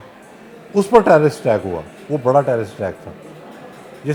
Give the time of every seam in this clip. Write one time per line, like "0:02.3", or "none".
none